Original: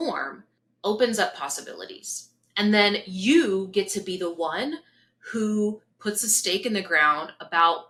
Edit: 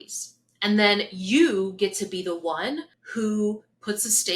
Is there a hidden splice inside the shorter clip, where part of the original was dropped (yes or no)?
yes